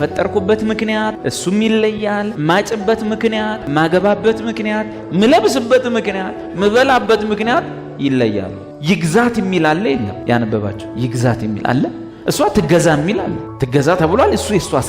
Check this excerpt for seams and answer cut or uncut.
cut